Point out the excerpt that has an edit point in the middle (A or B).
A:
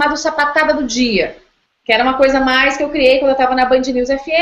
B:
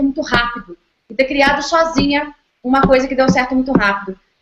B